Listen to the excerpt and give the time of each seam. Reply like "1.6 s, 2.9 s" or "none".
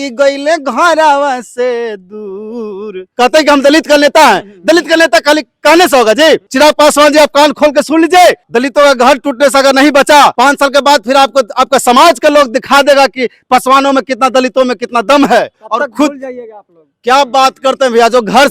3.0 s, 6.5 s, 8.5 s, 10.3 s, 15.5 s